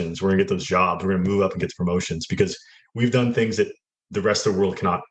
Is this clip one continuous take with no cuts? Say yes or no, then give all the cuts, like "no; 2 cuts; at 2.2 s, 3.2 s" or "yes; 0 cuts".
yes; 0 cuts